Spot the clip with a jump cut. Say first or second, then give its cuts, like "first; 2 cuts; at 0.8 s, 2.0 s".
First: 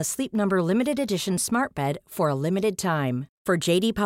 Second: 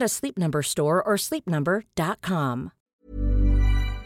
second; 1 cut; at 3.0 s